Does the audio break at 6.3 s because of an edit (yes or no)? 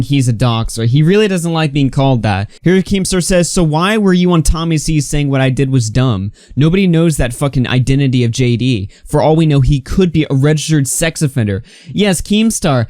no